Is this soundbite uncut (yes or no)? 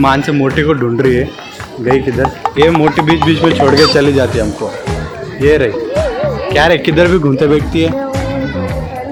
yes